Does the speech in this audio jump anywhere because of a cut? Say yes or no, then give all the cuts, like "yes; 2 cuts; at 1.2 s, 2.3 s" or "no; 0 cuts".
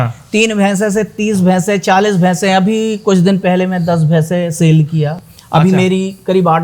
no; 0 cuts